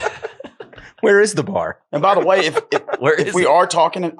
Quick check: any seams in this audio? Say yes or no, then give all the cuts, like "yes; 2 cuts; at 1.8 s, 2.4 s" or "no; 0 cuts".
no; 0 cuts